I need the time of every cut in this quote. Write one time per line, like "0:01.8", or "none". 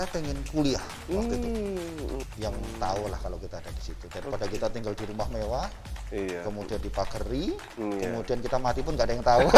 0:02.3